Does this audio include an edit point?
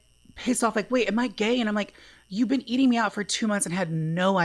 yes; 1 cut; at 1.7 s

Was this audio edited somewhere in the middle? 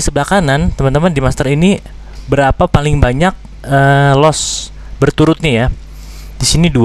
no; 0 cuts

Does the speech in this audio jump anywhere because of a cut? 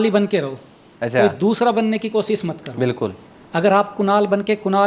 no; 0 cuts

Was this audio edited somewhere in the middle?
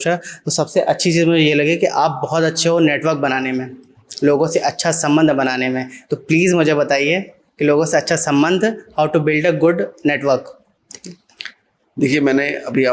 no; 0 cuts

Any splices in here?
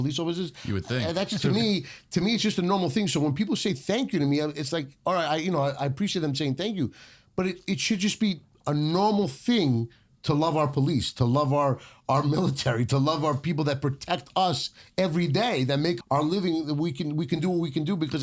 yes; 1 cut; at 16.0 s

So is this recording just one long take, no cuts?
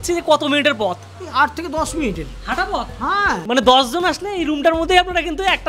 no; 1 cut; at 3.4 s

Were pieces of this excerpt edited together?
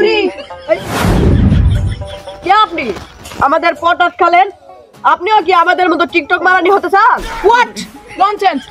yes; 2 cuts; at 0.9 s, 2.0 s

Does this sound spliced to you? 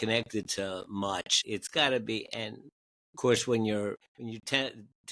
yes; 2 cuts; at 1.4 s, 4.1 s

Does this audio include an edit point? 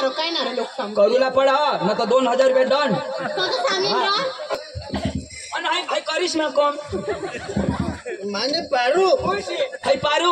yes; 1 cut; at 4.5 s

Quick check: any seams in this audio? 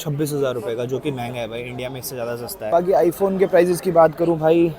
no; 0 cuts

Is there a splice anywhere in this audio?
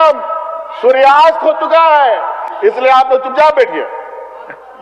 no; 0 cuts

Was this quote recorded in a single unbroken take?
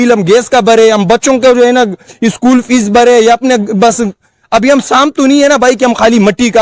yes; 0 cuts

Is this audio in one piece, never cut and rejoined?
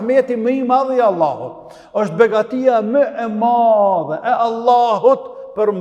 yes; 0 cuts

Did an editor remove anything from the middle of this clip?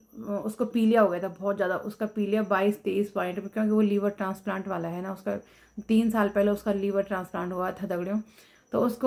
no; 0 cuts

